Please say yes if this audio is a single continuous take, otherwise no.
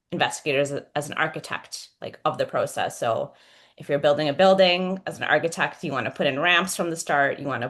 yes